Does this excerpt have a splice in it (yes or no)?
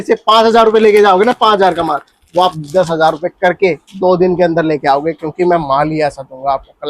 no